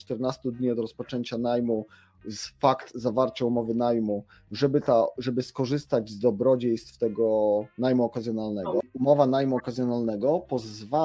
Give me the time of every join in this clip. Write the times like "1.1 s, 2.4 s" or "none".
8.8 s